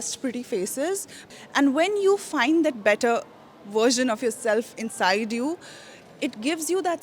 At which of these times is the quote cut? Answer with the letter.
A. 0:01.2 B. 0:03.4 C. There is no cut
A